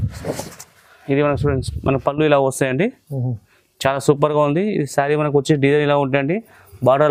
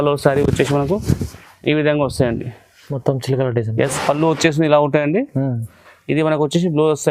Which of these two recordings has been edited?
second; 1 cut; at 3.9 s

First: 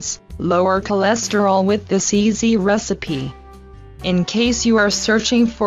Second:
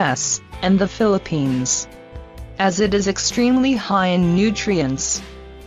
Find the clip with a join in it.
second; 1 cut; at 1.6 s

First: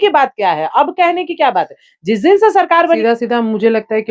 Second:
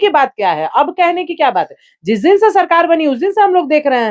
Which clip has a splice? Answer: first; 1 cut; at 3.0 s

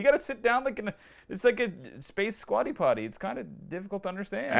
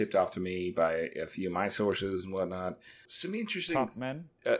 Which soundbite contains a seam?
second; 1 cut; at 3.1 s

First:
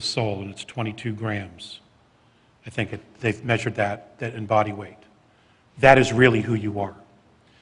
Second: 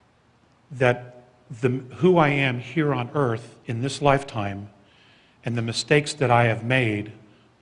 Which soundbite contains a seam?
first; 1 cut; at 6.7 s

